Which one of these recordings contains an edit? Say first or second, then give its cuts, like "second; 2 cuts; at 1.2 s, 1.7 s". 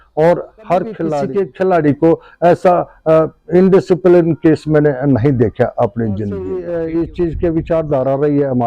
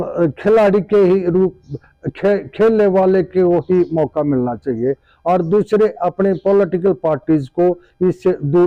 first; 2 cuts; at 1.2 s, 6.5 s